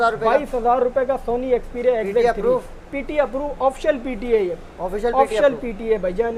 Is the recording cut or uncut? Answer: uncut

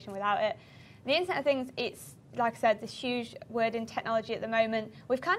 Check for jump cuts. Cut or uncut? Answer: cut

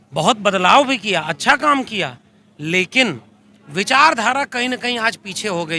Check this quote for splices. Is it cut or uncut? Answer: uncut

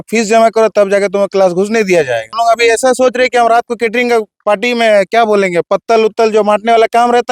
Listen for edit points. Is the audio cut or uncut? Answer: cut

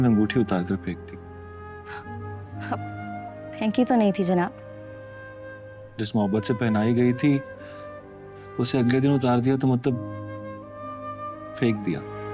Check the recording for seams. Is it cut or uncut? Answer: uncut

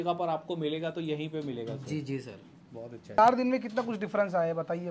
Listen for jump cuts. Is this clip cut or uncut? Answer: cut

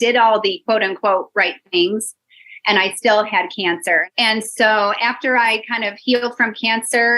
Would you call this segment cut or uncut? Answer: cut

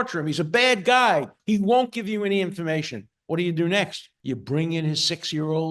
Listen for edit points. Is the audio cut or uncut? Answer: cut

